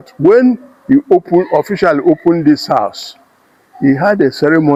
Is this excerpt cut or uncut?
uncut